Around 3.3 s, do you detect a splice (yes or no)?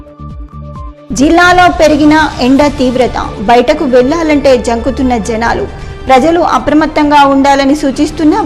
no